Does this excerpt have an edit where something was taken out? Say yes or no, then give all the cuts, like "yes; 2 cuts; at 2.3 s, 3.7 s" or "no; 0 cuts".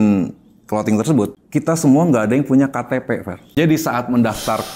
yes; 2 cuts; at 1.4 s, 3.4 s